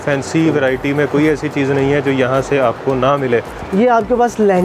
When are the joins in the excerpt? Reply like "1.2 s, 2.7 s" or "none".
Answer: 3.6 s